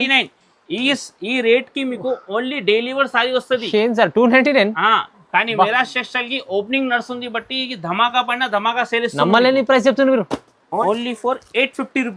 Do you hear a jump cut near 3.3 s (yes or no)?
no